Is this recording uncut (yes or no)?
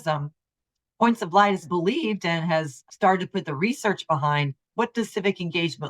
no